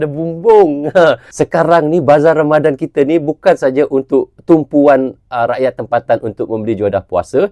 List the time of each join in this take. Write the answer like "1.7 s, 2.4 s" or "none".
1.3 s

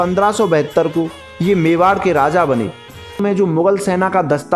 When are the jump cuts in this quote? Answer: 3.2 s

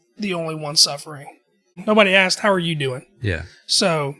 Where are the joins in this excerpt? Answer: 1.8 s

